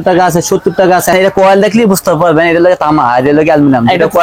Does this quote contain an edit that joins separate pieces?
yes; 1 cut; at 1.1 s

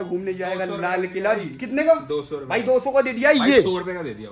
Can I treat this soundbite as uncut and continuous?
yes; 0 cuts

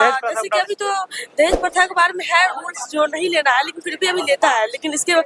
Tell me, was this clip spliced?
no; 0 cuts

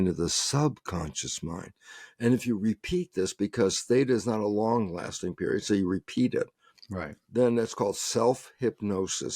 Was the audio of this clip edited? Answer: no; 0 cuts

